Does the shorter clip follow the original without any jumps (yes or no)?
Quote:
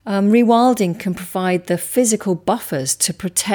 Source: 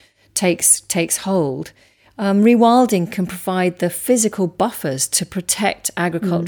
yes